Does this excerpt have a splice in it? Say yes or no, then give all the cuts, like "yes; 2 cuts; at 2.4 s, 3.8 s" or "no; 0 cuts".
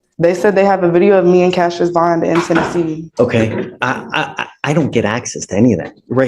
yes; 1 cut; at 3.1 s